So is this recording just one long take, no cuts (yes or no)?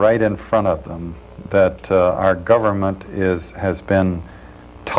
yes